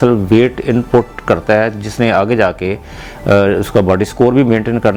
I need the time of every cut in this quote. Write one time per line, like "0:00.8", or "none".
none